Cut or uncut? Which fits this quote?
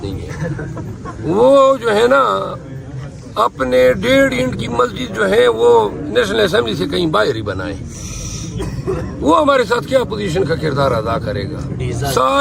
uncut